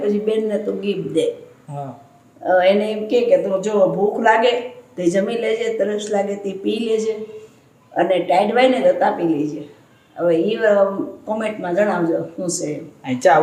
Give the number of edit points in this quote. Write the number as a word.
zero